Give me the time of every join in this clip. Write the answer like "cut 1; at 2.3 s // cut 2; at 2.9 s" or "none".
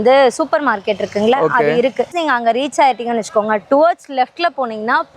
cut 1; at 2.1 s

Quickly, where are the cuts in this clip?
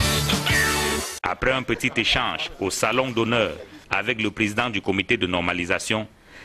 none

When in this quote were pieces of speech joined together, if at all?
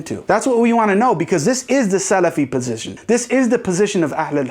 cut 1; at 2.9 s

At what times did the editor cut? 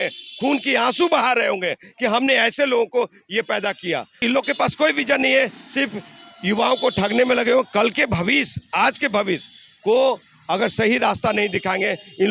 cut 1; at 4.2 s

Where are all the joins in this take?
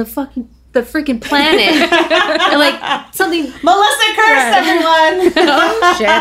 none

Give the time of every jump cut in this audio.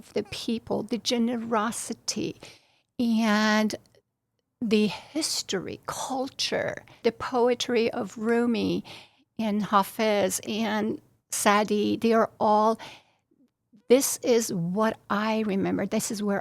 cut 1; at 7.0 s

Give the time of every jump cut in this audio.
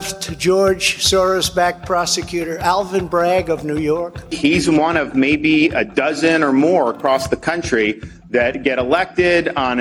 cut 1; at 4.3 s

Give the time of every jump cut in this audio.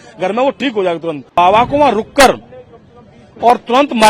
cut 1; at 1.4 s

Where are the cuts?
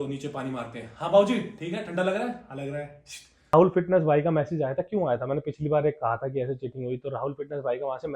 cut 1; at 3.5 s

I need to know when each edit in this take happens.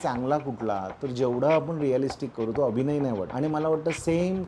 cut 1; at 3.3 s

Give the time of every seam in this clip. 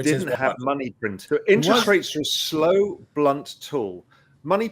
cut 1; at 1.2 s

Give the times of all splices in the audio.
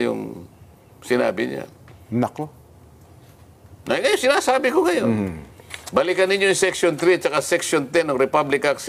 none

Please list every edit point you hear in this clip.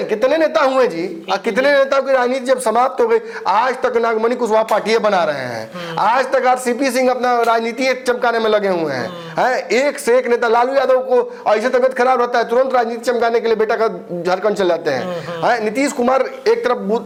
none

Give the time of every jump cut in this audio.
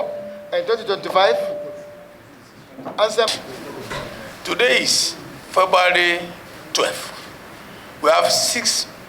cut 1; at 3.3 s

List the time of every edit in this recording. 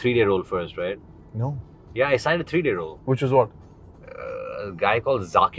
none

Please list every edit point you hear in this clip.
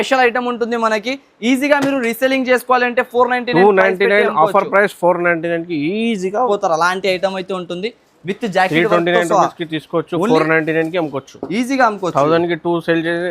cut 1; at 6.5 s

